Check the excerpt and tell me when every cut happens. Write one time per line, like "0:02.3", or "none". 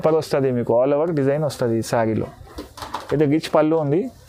none